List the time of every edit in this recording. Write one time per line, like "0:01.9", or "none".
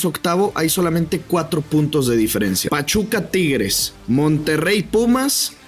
0:02.6
0:03.9

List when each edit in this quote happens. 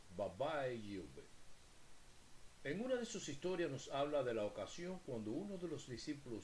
0:04.6

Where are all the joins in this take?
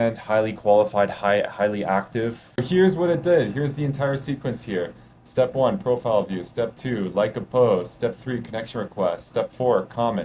0:02.6

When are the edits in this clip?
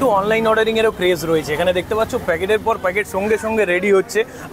none

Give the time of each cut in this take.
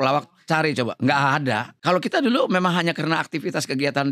0:01.7

